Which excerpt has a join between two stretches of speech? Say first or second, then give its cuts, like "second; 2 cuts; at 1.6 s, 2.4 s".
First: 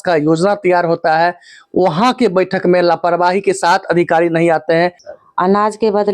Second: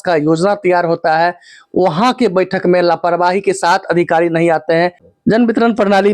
first; 1 cut; at 5.1 s